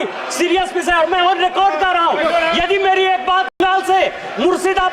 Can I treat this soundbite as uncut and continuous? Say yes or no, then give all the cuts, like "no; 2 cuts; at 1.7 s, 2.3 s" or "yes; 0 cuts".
no; 1 cut; at 3.6 s